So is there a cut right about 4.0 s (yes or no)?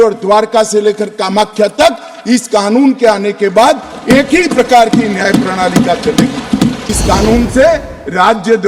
no